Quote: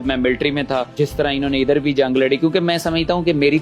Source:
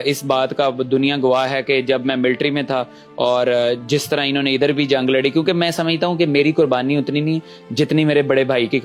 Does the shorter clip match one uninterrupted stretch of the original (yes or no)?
no